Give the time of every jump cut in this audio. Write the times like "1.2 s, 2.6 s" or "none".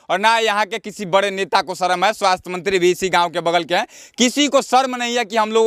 none